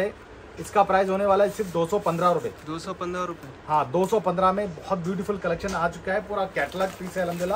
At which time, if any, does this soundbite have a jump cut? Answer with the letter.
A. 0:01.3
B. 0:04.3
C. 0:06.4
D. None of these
D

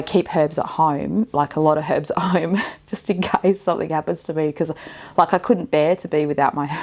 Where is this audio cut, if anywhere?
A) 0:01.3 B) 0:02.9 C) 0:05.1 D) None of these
D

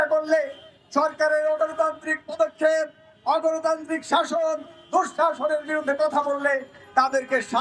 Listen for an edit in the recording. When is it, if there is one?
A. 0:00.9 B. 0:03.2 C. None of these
C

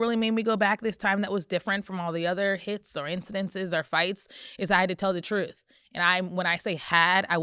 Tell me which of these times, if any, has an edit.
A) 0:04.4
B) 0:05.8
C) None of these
C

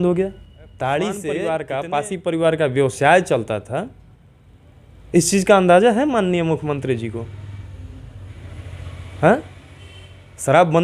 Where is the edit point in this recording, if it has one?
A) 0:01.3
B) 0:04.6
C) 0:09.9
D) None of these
A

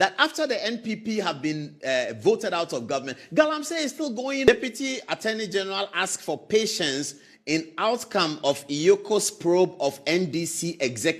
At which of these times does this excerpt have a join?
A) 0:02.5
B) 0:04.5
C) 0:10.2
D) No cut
B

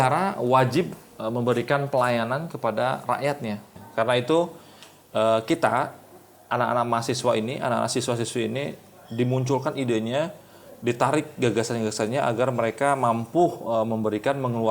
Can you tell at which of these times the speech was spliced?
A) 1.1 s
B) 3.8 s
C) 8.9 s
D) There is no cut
B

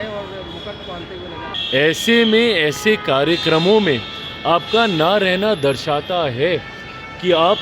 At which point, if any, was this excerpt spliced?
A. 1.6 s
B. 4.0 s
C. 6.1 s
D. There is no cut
A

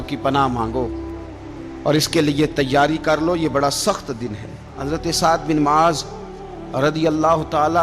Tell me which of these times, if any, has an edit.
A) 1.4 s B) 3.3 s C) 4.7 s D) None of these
C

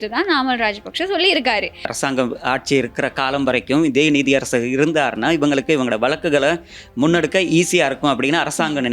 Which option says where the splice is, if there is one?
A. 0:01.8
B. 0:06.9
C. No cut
A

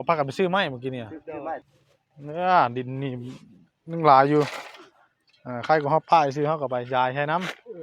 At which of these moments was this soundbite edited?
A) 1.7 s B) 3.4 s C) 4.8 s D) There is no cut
A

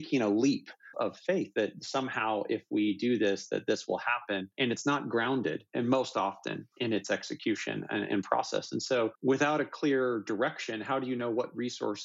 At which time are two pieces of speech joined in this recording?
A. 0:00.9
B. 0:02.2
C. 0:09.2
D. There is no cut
A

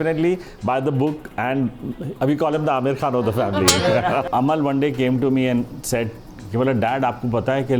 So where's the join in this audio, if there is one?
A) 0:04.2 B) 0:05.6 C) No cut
A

